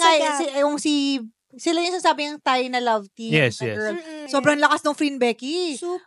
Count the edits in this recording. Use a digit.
1